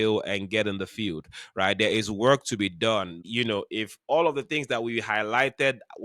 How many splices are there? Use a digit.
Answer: 1